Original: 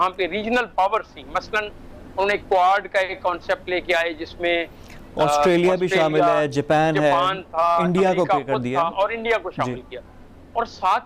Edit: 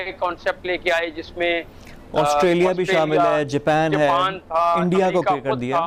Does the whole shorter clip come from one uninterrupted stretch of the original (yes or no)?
yes